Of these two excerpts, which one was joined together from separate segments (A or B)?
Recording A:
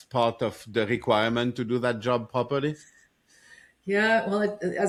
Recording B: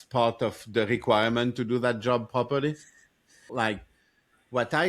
B